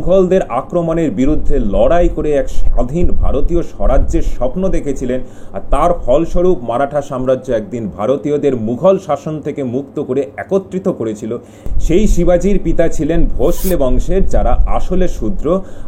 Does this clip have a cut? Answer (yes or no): no